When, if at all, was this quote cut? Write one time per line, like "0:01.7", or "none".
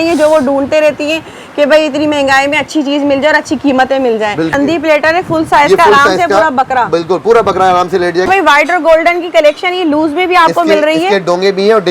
0:04.5
0:08.3